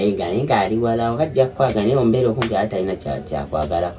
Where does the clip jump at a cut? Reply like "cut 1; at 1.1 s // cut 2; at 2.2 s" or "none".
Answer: none